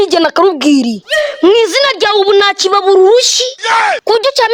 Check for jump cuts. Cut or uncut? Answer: uncut